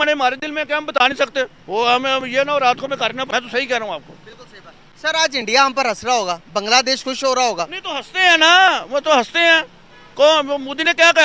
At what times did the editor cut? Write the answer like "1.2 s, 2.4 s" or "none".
3.3 s